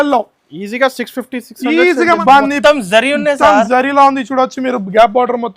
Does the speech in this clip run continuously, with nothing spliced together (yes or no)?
no